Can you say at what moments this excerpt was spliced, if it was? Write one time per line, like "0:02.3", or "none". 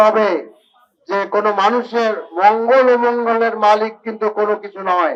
none